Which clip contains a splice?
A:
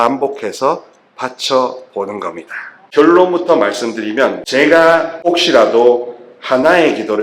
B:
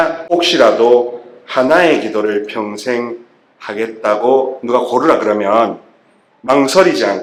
A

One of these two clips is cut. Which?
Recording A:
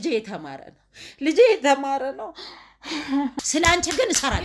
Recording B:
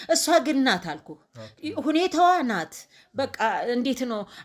A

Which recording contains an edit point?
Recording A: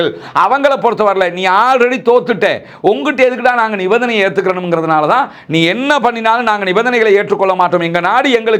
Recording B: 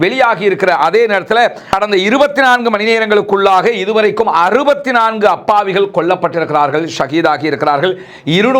B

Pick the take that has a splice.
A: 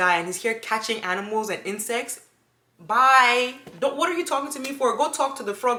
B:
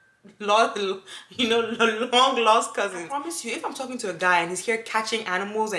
B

